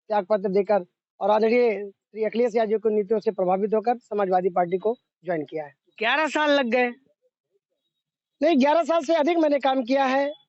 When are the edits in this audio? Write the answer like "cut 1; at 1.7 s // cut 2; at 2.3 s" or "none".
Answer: none